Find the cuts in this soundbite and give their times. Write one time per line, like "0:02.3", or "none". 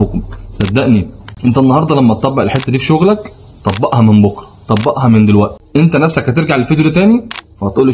0:01.2
0:05.6